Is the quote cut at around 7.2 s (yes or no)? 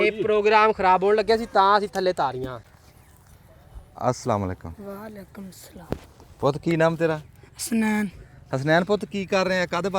no